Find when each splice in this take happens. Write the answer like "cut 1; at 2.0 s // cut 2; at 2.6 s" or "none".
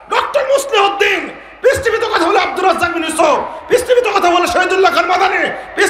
none